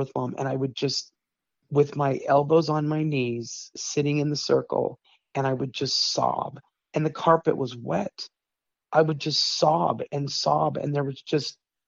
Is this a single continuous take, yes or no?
yes